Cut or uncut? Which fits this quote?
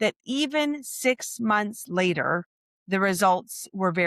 uncut